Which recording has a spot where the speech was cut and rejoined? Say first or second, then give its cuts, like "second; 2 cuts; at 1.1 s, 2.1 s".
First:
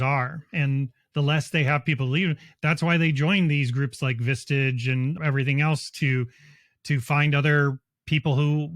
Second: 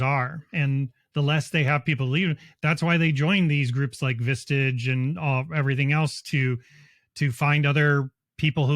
first; 1 cut; at 5.2 s